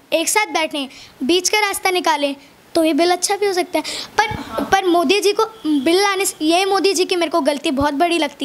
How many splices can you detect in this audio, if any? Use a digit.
0